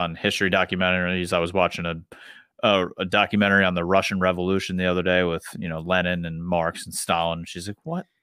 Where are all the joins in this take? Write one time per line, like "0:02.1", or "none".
none